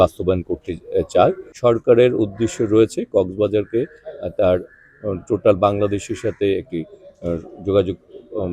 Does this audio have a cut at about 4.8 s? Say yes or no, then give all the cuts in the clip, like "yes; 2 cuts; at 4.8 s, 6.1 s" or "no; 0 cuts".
no; 1 cut; at 1.5 s